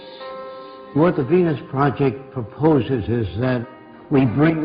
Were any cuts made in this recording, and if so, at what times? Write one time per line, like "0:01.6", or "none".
none